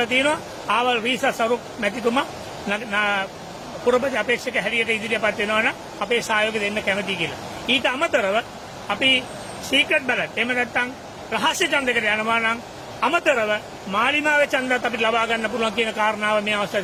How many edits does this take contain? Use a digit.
0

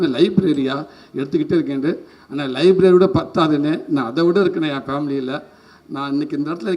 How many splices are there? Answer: 0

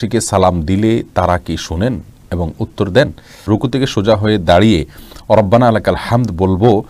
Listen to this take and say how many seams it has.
1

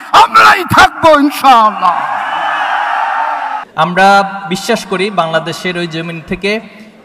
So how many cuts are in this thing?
1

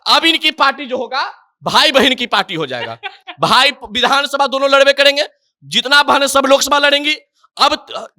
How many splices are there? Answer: 0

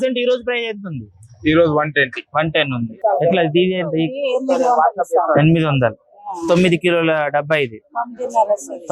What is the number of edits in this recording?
1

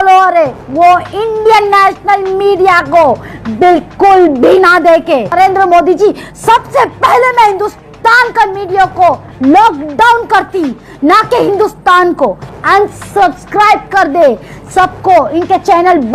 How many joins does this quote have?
2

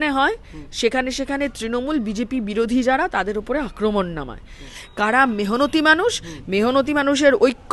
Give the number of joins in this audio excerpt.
1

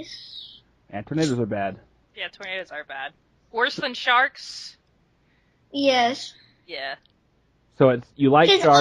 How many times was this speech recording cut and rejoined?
1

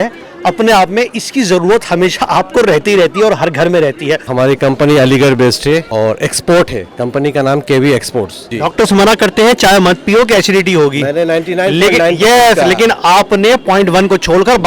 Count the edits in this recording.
2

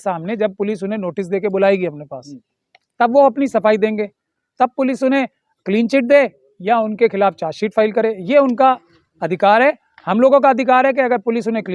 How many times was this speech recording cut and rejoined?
0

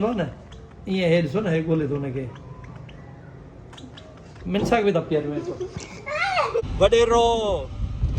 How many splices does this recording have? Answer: 1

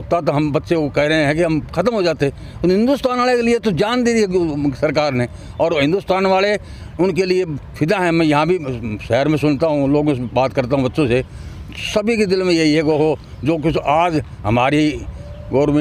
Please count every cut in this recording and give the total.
0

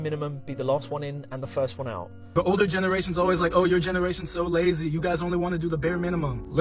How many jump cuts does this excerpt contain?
1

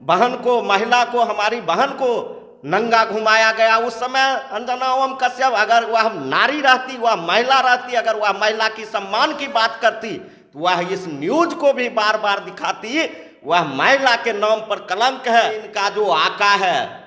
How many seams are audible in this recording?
1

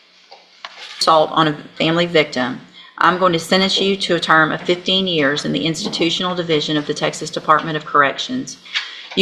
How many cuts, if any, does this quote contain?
1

